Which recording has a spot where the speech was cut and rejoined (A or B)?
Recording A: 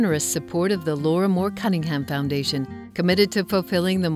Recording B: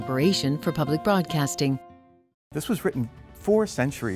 B